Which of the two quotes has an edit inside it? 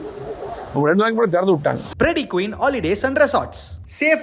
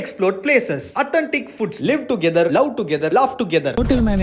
first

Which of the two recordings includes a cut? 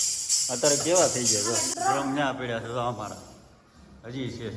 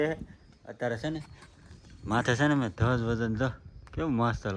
first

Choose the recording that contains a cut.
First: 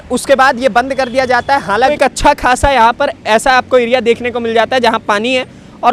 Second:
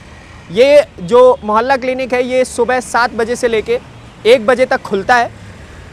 first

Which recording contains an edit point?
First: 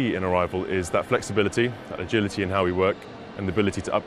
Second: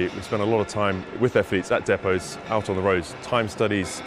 second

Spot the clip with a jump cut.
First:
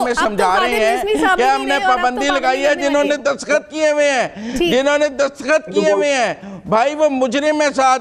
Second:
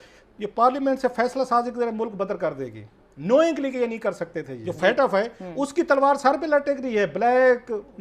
second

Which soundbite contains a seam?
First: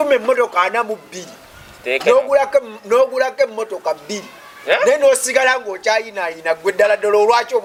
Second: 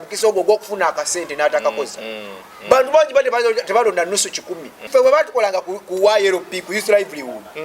second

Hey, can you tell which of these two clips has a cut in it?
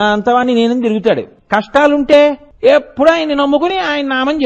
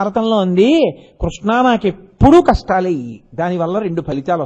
first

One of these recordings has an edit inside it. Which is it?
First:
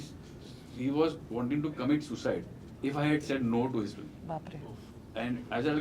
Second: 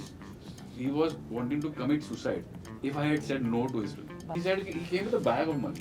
second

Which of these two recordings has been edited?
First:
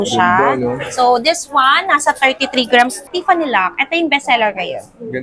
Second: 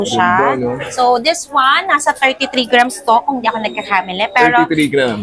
first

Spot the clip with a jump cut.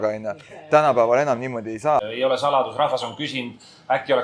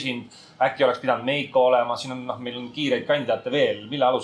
first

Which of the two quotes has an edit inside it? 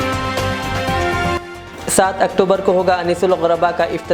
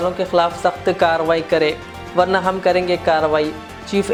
first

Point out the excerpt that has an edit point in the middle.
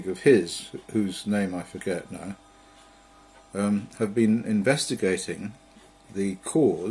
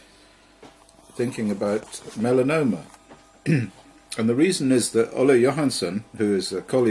first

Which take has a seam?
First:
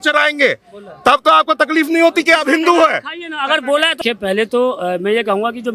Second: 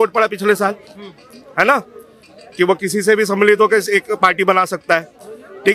first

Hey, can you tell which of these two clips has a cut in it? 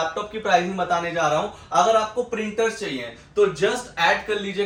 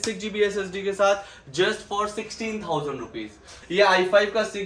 second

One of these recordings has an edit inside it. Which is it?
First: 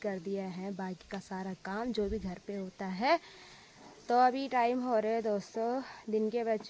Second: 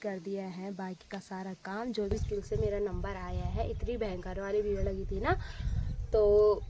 second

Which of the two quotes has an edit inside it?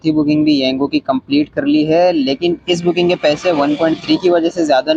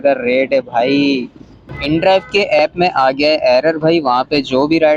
second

